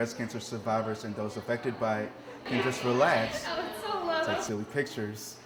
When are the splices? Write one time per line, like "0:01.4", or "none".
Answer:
none